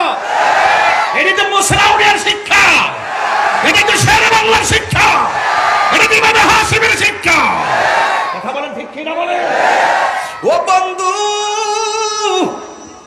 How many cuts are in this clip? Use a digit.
1